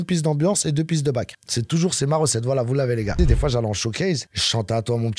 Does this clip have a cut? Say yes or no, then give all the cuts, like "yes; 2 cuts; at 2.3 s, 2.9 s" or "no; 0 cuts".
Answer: yes; 1 cut; at 3.1 s